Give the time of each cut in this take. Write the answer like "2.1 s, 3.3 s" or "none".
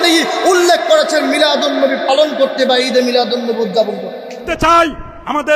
4.5 s